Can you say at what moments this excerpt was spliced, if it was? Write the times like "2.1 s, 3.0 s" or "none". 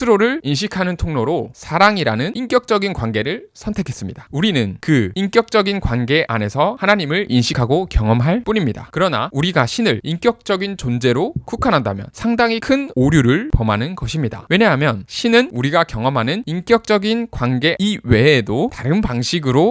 4.2 s, 12.1 s